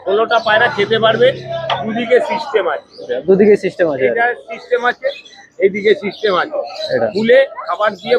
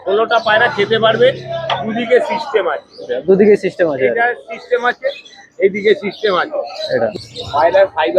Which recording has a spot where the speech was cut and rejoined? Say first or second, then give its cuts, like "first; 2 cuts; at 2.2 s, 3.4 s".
second; 1 cut; at 7.1 s